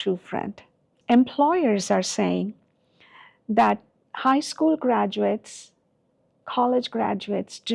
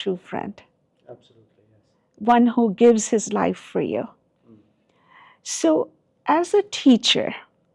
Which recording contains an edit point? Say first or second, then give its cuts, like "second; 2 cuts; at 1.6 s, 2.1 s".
first; 1 cut; at 0.9 s